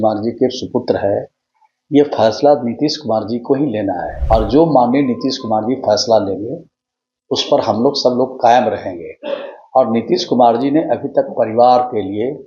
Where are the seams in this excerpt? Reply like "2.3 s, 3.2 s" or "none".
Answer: 4.1 s